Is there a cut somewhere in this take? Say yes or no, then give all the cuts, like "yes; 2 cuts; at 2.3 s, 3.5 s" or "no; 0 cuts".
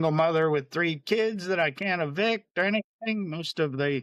no; 0 cuts